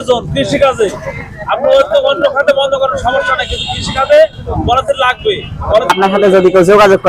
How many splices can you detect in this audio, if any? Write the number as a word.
one